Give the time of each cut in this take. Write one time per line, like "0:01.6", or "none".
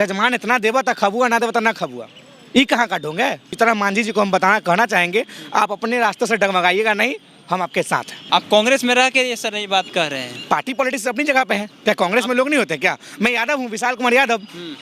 0:03.5
0:08.2